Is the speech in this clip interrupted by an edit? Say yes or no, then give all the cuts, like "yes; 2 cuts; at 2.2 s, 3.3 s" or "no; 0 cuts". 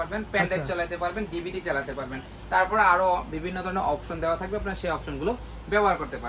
no; 0 cuts